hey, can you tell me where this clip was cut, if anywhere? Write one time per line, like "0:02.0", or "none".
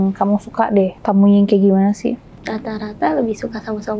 0:01.0
0:02.3